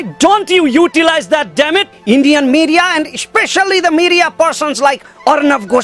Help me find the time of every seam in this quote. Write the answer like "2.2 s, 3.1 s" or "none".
1.9 s